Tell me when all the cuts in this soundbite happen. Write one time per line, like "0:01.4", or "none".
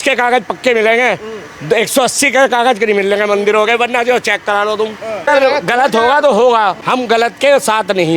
0:05.3
0:06.8